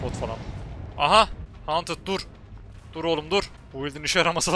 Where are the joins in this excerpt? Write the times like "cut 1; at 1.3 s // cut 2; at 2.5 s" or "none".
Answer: cut 1; at 1.5 s // cut 2; at 3.6 s